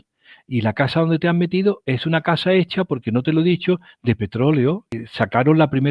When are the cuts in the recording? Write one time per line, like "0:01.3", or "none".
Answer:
0:04.9